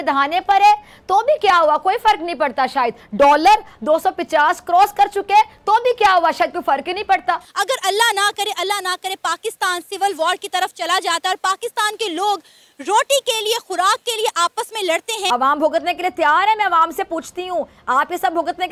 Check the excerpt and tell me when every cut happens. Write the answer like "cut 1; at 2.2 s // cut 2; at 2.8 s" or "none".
cut 1; at 7.5 s // cut 2; at 15.3 s